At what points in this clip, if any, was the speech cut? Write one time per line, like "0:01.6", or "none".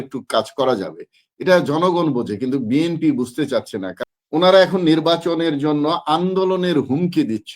0:04.0